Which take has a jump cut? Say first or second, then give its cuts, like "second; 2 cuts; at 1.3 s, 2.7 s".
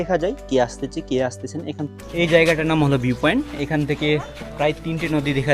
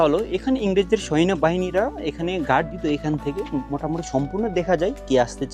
first; 1 cut; at 1.9 s